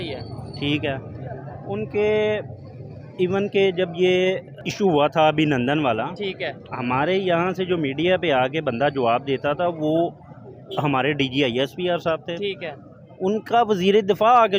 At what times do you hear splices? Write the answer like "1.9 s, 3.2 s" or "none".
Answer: 4.5 s